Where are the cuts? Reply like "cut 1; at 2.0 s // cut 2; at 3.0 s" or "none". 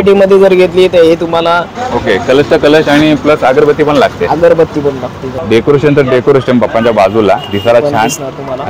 cut 1; at 1.8 s // cut 2; at 5.3 s